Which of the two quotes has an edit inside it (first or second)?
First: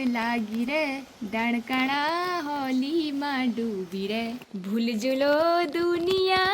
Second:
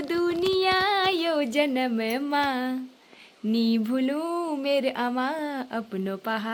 first